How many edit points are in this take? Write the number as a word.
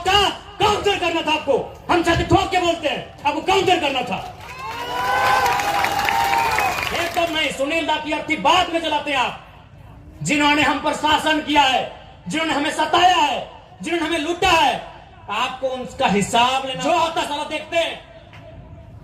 two